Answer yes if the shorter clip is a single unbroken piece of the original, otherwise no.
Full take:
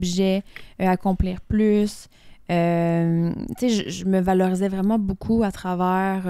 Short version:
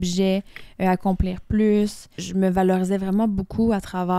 no